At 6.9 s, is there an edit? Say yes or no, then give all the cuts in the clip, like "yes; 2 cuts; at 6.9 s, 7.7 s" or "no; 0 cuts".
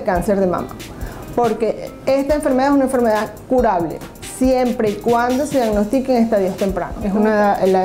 yes; 1 cut; at 6.9 s